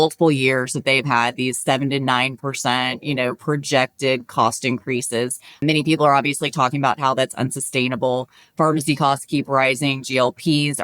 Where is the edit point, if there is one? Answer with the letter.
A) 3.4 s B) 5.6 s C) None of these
B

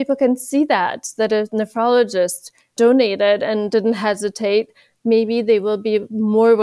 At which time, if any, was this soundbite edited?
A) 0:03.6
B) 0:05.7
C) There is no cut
C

